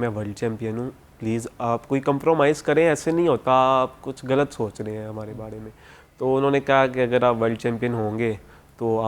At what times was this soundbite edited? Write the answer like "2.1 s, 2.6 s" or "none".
none